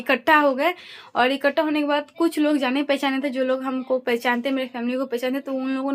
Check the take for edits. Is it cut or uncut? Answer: uncut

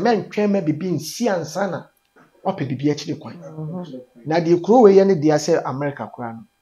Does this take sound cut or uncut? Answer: uncut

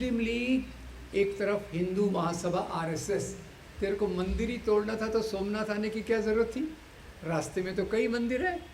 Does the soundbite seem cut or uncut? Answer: cut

